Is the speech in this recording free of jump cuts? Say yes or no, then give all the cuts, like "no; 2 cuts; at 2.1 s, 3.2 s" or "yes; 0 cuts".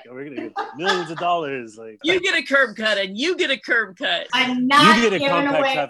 no; 2 cuts; at 2.0 s, 4.2 s